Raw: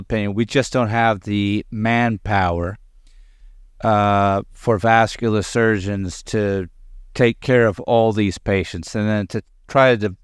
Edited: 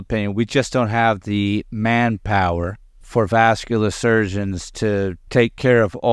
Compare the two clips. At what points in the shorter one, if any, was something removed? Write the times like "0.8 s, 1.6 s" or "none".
3.0 s, 5.2 s